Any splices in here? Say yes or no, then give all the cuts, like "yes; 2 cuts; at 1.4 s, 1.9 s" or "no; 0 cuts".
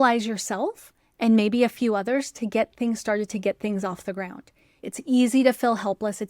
yes; 1 cut; at 4.8 s